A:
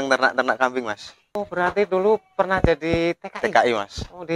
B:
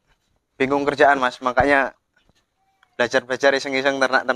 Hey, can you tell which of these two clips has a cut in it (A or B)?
A